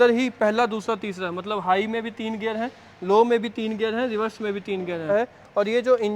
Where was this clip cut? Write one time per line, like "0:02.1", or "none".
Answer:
0:05.0